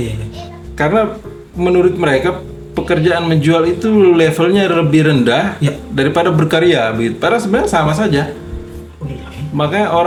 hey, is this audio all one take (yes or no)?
yes